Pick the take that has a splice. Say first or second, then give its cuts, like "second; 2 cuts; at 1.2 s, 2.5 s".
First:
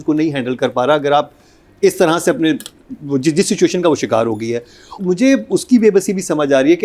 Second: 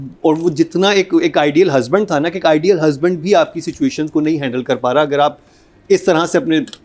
first; 1 cut; at 4.9 s